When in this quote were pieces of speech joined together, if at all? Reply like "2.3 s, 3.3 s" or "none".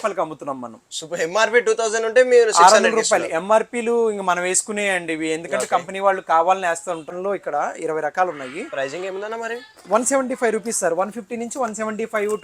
7.1 s